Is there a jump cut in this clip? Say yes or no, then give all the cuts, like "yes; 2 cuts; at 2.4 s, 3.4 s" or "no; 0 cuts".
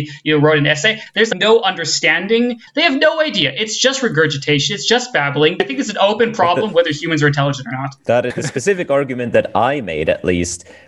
yes; 4 cuts; at 1.0 s, 2.6 s, 5.6 s, 8.4 s